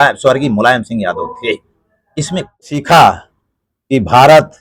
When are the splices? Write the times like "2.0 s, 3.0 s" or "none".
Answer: 2.6 s